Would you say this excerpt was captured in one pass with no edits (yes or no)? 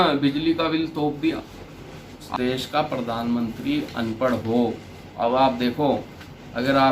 no